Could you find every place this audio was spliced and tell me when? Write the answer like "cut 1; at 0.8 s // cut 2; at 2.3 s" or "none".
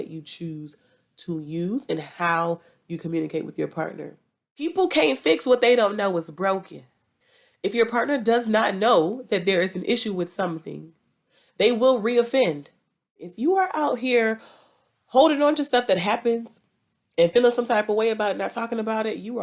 cut 1; at 4.7 s // cut 2; at 13.3 s